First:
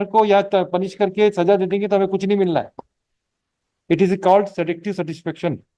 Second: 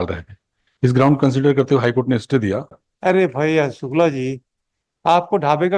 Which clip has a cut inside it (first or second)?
second